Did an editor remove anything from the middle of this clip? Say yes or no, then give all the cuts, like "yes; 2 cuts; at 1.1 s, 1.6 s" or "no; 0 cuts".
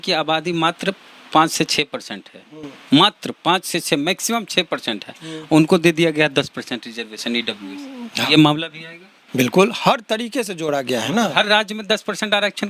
no; 0 cuts